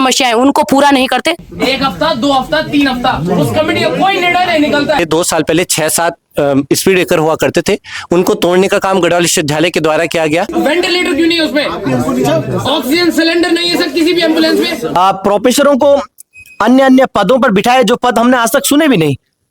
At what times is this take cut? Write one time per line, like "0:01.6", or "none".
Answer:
0:01.5
0:05.0
0:10.5
0:15.0